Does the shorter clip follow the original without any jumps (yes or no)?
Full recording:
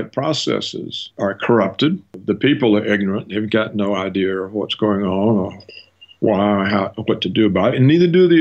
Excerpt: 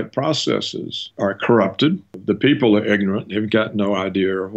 yes